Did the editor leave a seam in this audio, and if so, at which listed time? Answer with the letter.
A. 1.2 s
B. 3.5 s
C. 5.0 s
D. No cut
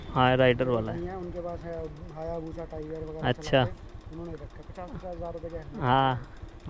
D